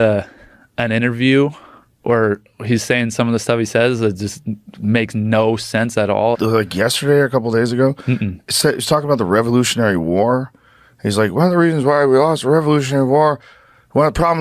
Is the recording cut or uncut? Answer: cut